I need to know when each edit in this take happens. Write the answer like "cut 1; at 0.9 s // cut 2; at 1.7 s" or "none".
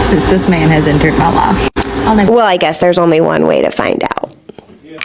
cut 1; at 2.3 s